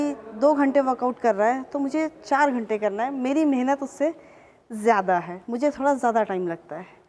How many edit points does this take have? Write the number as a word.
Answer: zero